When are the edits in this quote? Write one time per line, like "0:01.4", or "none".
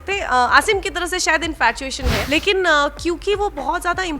0:02.2